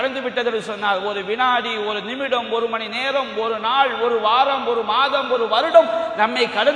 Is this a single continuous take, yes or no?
yes